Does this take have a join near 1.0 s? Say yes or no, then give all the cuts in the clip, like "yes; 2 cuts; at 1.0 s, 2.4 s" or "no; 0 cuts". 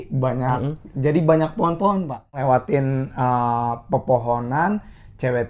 no; 1 cut; at 2.4 s